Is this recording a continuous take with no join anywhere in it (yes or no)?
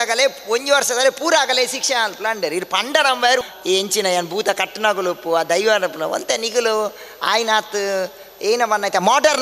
no